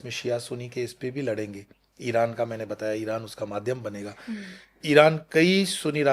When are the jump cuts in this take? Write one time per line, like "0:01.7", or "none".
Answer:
none